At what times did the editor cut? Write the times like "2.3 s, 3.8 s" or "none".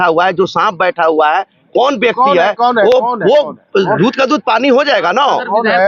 none